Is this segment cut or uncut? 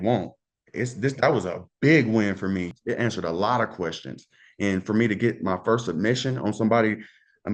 cut